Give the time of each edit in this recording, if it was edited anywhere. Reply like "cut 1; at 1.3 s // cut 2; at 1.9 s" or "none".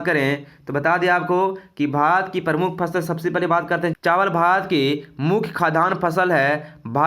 cut 1; at 4.0 s

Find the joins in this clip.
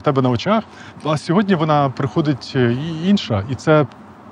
cut 1; at 1.0 s

